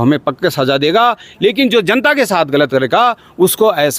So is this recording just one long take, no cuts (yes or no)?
yes